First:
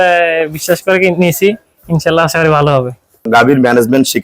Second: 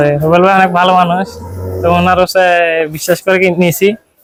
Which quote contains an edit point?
first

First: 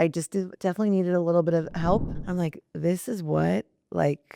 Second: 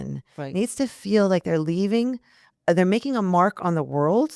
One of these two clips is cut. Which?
first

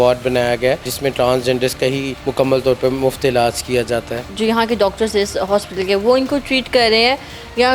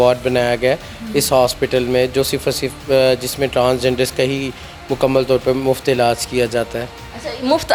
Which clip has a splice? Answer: first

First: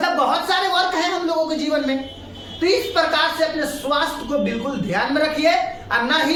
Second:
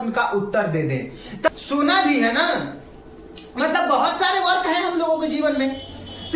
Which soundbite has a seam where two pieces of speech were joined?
second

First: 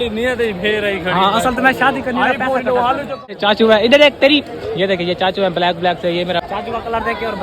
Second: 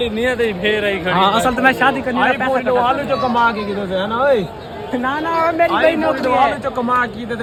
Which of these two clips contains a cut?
first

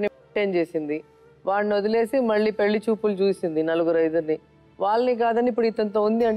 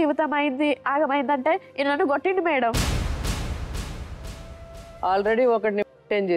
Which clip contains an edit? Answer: second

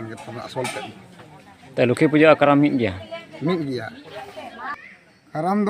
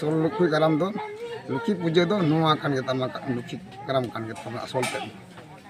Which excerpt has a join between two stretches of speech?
first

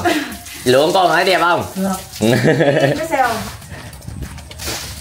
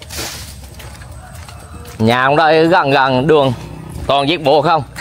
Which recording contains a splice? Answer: first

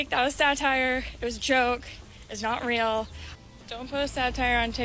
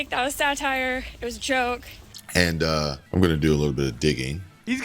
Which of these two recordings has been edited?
second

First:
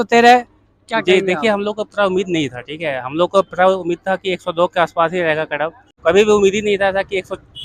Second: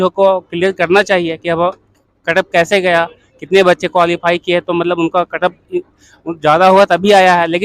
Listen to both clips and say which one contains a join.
first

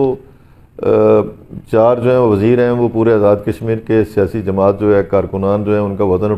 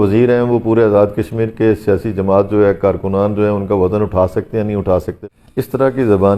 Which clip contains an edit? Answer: second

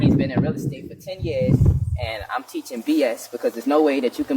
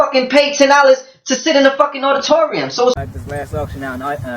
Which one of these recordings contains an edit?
second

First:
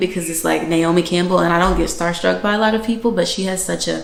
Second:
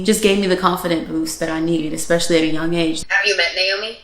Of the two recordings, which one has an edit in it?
second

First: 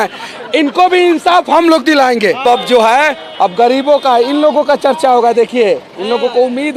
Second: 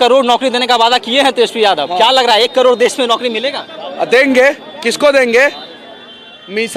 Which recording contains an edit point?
first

